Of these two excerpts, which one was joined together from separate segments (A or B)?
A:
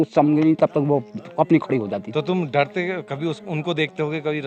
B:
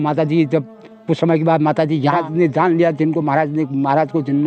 B